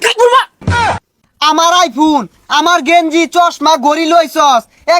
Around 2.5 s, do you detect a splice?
no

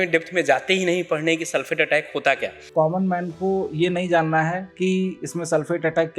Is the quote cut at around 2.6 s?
yes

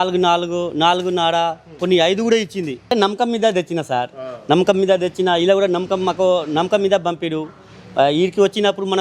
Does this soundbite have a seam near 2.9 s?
yes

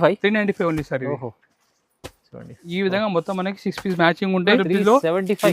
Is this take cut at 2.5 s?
no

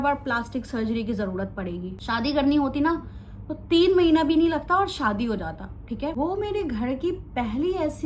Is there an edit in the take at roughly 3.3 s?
no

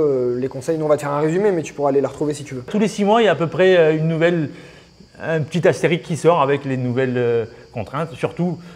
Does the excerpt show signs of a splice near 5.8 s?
no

